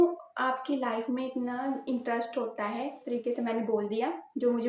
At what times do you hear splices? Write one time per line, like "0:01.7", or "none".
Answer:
0:03.0